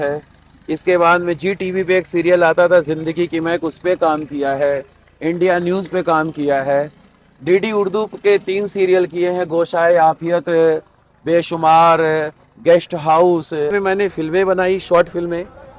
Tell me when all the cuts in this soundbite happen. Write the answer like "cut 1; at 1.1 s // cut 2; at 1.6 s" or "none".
cut 1; at 13.7 s